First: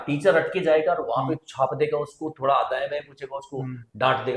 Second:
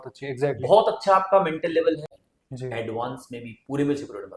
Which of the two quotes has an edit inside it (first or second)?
second